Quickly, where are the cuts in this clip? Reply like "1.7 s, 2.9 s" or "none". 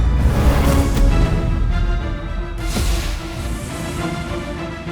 3.4 s